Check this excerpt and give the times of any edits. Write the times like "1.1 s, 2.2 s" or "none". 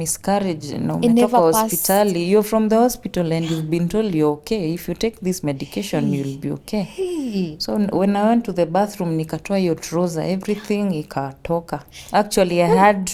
none